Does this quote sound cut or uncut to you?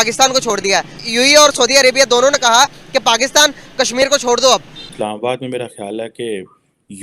cut